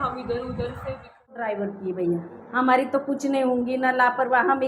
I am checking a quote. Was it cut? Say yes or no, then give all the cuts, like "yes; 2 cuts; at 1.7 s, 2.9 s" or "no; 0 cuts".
yes; 1 cut; at 1.4 s